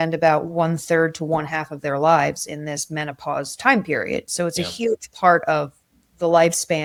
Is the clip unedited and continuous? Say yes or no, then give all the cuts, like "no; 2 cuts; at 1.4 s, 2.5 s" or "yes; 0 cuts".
yes; 0 cuts